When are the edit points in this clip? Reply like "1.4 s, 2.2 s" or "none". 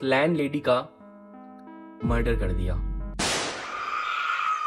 none